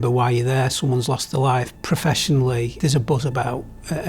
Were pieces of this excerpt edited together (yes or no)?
yes